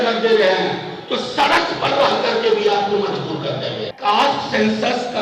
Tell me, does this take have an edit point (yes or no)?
yes